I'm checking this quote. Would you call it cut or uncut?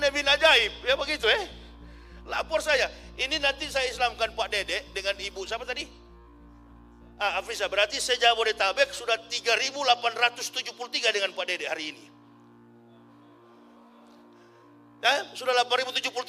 uncut